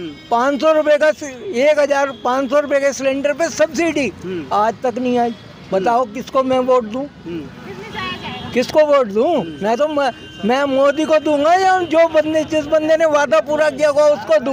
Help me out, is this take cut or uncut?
uncut